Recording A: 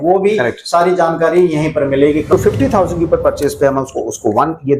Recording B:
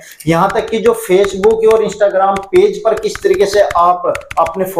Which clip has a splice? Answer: A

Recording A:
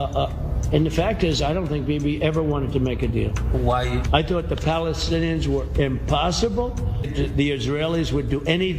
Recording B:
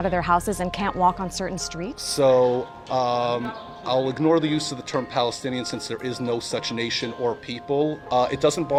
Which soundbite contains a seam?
A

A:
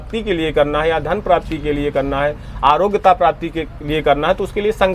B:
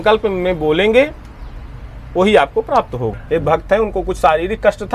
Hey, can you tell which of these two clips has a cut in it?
B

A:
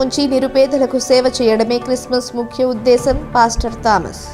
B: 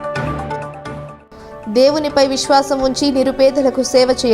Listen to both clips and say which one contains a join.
B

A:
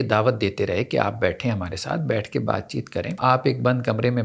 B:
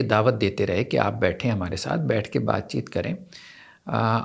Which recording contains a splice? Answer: A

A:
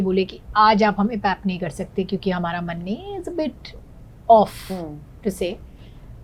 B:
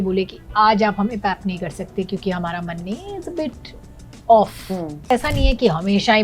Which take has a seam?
B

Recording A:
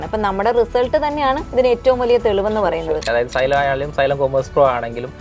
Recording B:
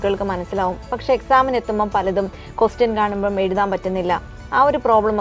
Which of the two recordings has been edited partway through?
A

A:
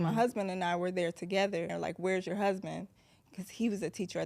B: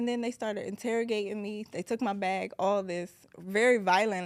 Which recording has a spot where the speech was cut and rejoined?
A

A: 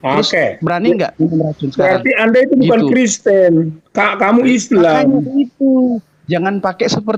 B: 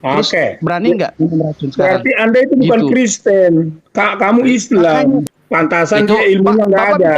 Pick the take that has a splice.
B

